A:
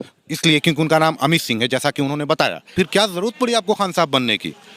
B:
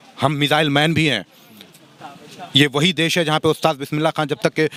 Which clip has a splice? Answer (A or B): A